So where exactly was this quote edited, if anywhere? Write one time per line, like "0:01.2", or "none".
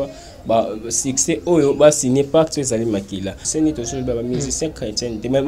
0:03.4